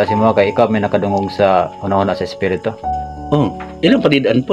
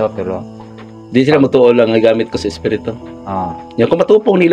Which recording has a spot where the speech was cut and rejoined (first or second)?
first